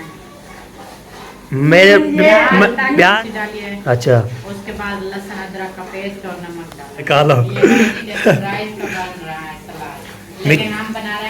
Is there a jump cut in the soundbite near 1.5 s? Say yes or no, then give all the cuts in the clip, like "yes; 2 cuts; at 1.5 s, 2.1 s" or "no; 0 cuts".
no; 2 cuts; at 3.1 s, 7.1 s